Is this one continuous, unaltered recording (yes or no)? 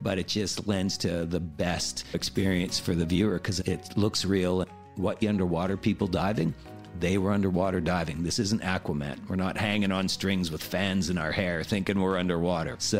no